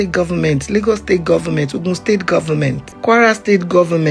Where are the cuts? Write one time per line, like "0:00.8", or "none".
0:02.9